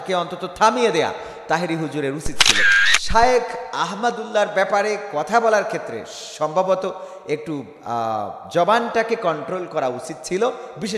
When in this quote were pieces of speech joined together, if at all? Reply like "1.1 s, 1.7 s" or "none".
2.6 s